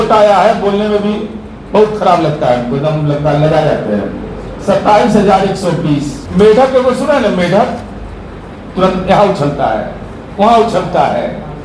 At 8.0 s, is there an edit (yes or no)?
no